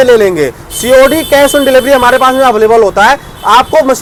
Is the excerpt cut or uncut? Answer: uncut